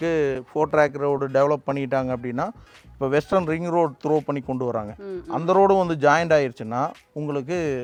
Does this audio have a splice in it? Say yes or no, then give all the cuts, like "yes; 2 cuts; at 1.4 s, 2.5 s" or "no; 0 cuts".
no; 0 cuts